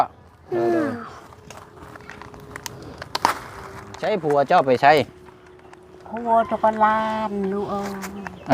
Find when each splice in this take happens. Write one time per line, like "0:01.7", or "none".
0:04.1